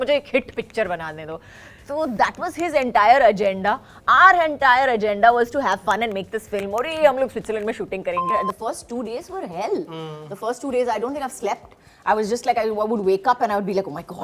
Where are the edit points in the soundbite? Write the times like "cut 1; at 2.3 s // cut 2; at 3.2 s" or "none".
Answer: cut 1; at 8.3 s

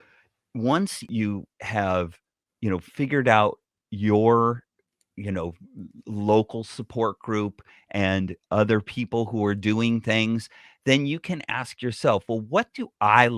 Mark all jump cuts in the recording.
cut 1; at 1.0 s

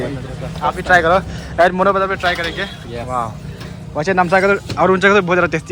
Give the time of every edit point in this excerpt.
none

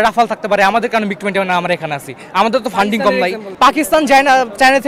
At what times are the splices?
cut 1; at 3.4 s

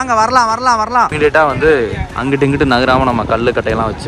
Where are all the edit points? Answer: cut 1; at 1.1 s

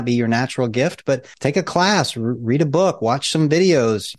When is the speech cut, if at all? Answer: cut 1; at 1.3 s

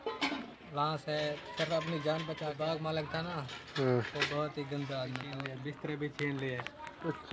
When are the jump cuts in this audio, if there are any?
cut 1; at 2.4 s // cut 2; at 5.3 s

